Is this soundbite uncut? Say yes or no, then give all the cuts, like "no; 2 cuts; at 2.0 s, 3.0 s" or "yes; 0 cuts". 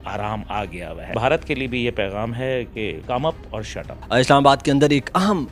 no; 3 cuts; at 1.2 s, 3.0 s, 3.9 s